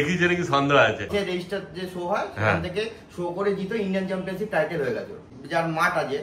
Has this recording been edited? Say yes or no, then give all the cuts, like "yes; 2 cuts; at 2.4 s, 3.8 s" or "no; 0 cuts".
yes; 2 cuts; at 1.1 s, 5.3 s